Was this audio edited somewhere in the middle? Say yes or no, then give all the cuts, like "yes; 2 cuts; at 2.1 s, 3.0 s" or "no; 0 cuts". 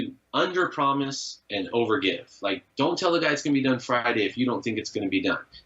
no; 0 cuts